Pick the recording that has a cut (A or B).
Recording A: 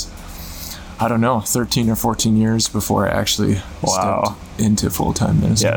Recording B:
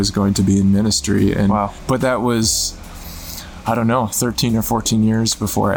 B